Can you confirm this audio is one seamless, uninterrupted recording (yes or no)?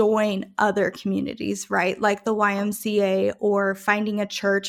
yes